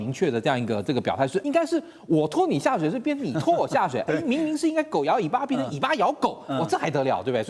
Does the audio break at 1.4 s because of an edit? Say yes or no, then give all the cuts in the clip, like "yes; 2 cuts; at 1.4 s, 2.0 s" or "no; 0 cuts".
yes; 1 cut; at 1.4 s